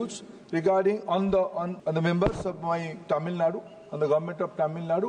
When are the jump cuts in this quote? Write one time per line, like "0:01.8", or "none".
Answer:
0:01.7